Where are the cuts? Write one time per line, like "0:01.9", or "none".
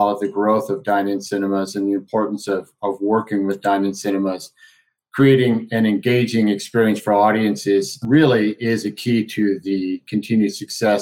none

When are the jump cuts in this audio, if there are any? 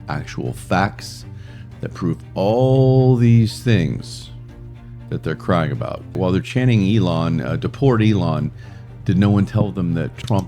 0:06.2

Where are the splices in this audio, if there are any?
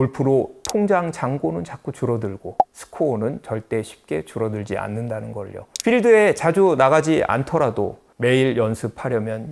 none

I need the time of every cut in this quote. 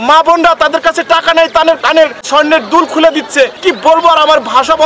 0:02.2
0:03.6

